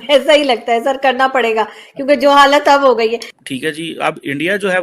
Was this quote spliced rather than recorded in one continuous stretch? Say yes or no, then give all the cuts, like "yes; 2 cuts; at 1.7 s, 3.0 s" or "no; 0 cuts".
yes; 1 cut; at 3.3 s